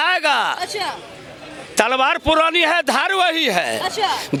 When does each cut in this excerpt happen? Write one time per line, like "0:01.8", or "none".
none